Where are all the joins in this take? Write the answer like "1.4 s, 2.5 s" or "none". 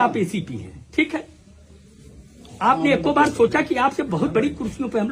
none